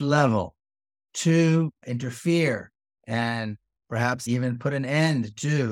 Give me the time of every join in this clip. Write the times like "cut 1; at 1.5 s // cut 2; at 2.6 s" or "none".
none